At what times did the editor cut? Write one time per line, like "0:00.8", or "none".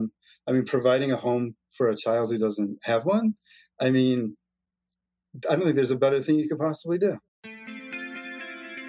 0:07.3